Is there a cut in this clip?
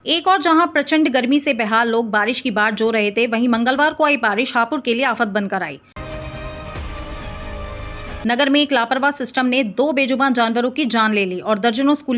yes; 2 cuts; at 5.9 s, 8.2 s

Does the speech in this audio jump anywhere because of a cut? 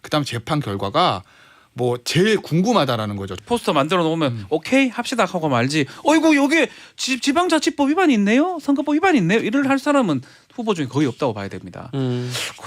yes; 1 cut; at 3.2 s

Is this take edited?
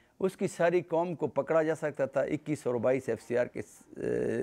no; 0 cuts

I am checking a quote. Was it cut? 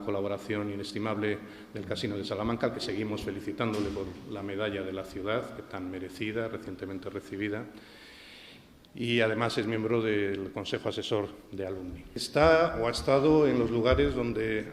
yes; 1 cut; at 12.2 s

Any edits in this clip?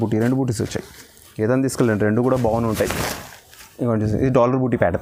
no; 0 cuts

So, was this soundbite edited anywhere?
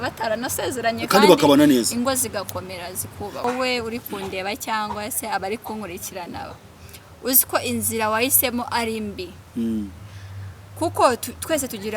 yes; 1 cut; at 3.4 s

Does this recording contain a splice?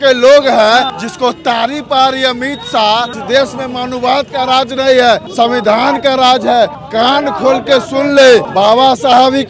yes; 5 cuts; at 1.0 s, 3.1 s, 5.3 s, 6.8 s, 8.5 s

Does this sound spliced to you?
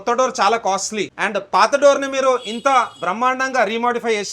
yes; 1 cut; at 1.2 s

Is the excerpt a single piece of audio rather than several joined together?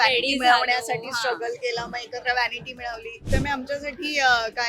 no; 1 cut; at 3.3 s

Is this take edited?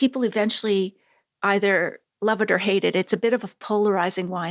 no; 0 cuts

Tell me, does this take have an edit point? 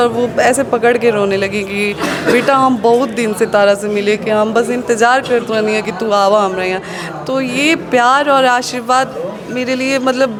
no; 0 cuts

